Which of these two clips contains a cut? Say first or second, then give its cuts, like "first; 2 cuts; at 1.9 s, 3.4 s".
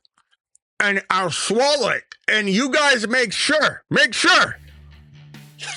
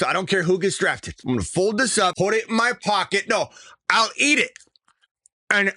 second; 2 cuts; at 1.1 s, 2.1 s